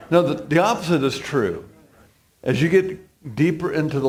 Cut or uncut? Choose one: uncut